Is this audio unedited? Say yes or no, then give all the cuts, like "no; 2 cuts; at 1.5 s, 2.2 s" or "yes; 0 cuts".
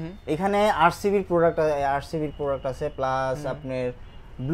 yes; 0 cuts